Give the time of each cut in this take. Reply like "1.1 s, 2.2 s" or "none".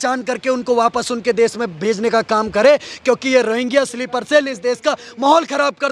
none